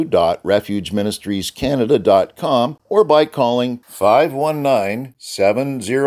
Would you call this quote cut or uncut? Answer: cut